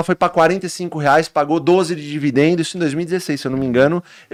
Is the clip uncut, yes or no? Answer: yes